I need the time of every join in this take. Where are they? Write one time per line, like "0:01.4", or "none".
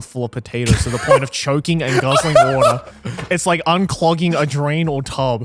none